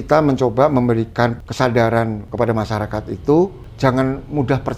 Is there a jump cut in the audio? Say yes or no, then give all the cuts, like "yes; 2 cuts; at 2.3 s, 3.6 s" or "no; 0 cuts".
yes; 3 cuts; at 1.4 s, 2.2 s, 3.6 s